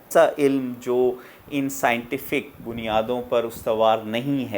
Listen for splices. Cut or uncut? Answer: uncut